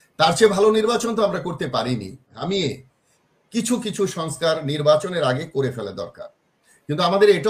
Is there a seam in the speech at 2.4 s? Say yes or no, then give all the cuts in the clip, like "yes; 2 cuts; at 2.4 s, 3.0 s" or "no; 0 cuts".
yes; 1 cut; at 2.4 s